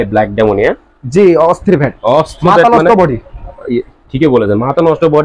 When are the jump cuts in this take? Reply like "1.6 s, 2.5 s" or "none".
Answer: none